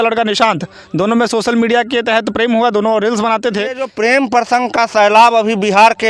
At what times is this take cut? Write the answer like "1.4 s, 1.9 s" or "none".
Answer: 3.9 s